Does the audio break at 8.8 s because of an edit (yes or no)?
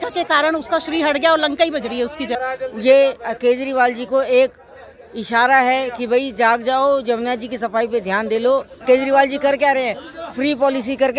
yes